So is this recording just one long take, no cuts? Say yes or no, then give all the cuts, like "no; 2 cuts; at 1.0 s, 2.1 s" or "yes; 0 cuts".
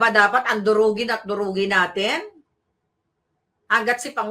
yes; 0 cuts